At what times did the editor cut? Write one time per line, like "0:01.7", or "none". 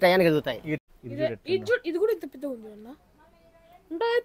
0:01.2